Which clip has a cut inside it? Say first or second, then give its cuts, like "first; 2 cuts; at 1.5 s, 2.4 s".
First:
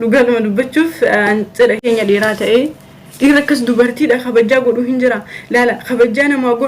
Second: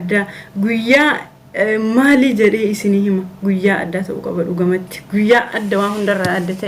first; 1 cut; at 1.9 s